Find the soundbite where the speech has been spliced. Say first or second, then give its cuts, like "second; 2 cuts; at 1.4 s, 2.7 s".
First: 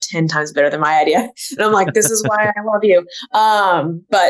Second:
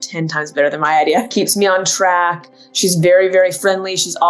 second; 1 cut; at 1.3 s